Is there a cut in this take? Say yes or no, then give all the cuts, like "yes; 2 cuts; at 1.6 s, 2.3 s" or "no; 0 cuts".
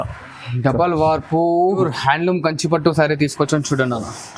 yes; 1 cut; at 1.8 s